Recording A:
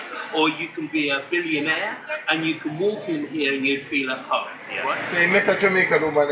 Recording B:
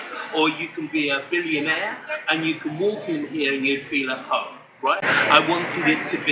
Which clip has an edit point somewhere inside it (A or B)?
A